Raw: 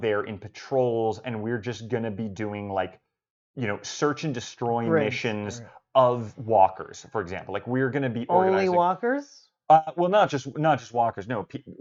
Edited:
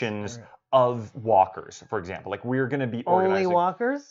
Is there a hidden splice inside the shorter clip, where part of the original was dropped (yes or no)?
no